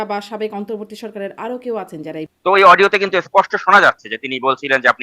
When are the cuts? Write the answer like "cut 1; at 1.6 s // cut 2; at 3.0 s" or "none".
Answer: cut 1; at 2.3 s

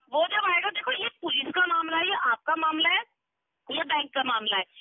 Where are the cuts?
none

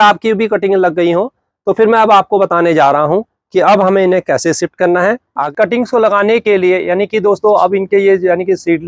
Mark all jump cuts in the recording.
cut 1; at 5.4 s

